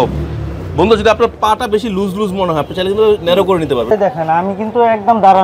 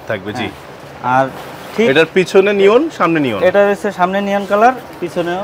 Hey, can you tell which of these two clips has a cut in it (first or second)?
first